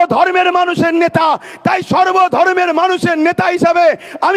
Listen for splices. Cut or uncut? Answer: uncut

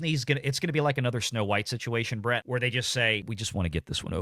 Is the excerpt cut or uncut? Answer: cut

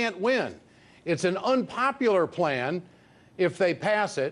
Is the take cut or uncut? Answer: uncut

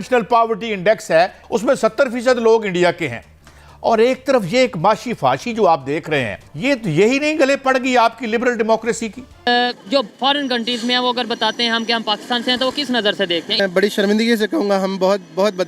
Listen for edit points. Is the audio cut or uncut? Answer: cut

